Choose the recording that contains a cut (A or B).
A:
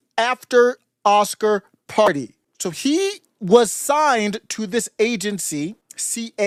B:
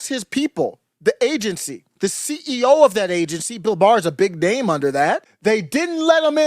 B